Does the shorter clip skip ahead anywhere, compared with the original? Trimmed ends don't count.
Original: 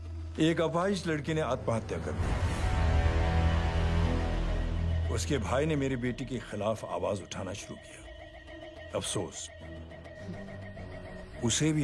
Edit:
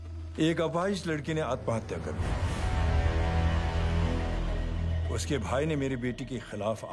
no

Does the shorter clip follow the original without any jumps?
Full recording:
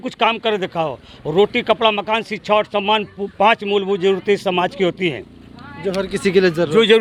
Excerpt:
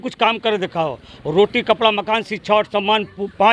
yes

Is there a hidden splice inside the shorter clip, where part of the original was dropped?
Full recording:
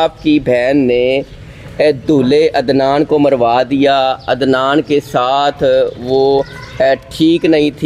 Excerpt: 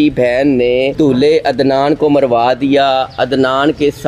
yes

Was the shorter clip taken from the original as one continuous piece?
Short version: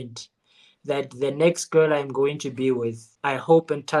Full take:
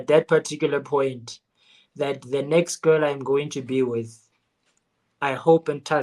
no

